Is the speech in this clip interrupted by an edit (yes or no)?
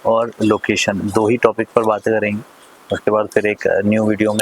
no